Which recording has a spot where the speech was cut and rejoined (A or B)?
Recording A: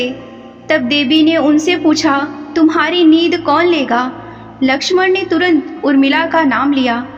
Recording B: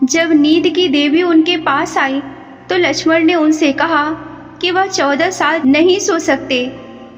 B